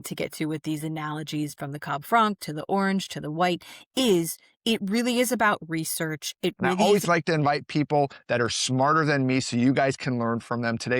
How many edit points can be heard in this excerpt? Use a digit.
1